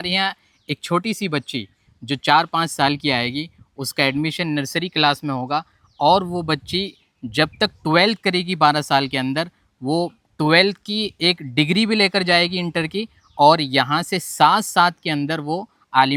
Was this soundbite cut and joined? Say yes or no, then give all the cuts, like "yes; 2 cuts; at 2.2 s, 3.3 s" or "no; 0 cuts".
no; 0 cuts